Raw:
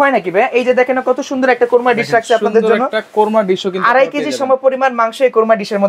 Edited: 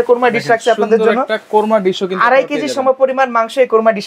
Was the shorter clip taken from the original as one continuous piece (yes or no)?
yes